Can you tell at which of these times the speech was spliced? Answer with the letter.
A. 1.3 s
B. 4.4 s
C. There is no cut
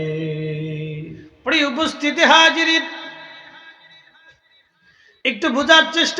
A